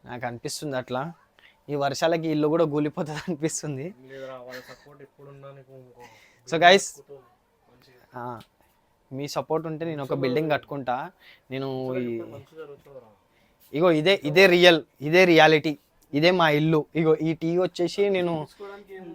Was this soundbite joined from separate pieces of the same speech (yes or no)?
no